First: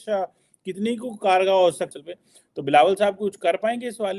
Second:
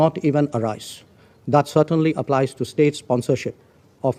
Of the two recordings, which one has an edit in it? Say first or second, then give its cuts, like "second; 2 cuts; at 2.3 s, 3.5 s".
first; 1 cut; at 2.0 s